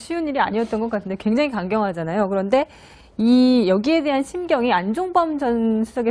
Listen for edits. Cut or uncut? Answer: uncut